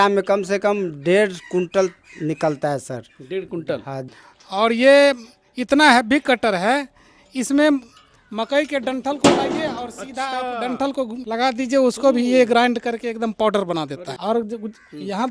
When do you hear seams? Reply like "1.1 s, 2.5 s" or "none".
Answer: 3.9 s, 14.1 s